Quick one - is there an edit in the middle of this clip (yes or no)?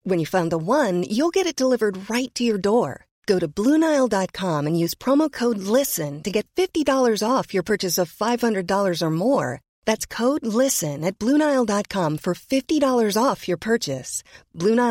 no